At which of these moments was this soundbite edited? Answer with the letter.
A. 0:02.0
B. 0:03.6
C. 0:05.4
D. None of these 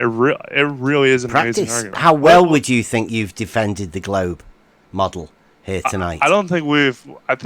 A